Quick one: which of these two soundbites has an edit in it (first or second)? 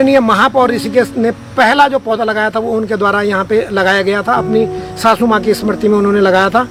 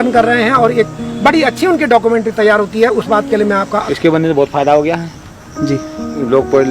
second